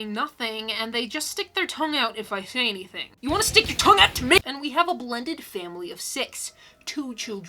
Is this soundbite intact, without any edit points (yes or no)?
no